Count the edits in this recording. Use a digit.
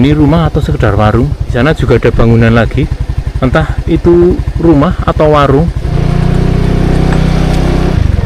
1